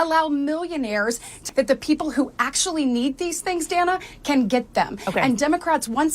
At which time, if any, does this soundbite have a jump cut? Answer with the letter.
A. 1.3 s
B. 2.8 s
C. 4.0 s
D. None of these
A